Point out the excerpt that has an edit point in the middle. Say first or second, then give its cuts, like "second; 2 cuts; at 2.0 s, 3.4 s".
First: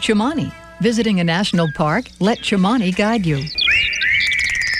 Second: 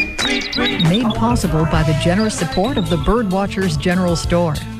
first; 1 cut; at 3.5 s